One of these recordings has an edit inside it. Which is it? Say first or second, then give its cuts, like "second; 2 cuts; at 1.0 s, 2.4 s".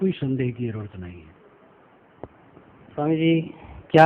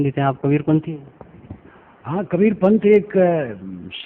first; 1 cut; at 2.0 s